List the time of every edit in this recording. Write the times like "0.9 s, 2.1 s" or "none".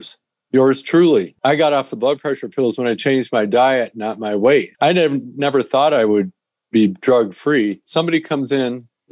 1.3 s, 4.7 s, 7.9 s